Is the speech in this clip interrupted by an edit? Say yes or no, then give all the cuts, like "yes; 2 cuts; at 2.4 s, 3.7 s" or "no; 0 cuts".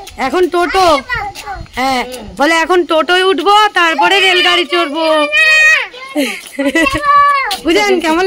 no; 0 cuts